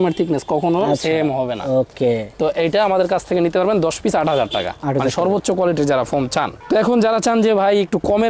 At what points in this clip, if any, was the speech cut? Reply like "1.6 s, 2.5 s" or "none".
none